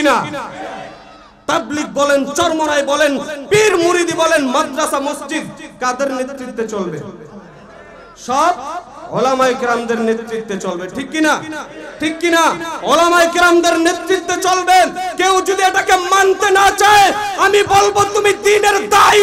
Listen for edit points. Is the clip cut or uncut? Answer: uncut